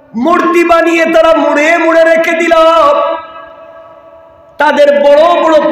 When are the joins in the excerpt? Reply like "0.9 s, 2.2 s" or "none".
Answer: none